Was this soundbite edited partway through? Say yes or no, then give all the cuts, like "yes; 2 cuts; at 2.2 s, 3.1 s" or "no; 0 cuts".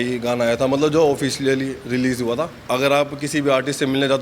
yes; 1 cut; at 2.6 s